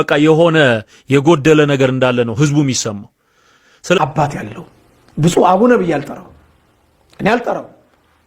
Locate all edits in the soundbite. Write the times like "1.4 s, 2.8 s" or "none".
4.0 s